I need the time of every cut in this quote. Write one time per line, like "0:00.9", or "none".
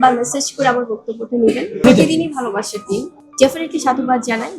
0:01.7
0:03.1